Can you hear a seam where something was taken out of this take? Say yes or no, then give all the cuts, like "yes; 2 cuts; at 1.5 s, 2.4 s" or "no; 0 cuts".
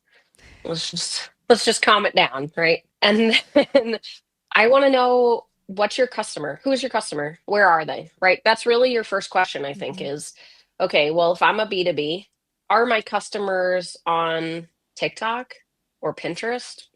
yes; 1 cut; at 2.9 s